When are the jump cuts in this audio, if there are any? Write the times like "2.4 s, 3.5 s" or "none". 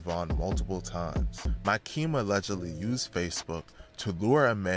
1.4 s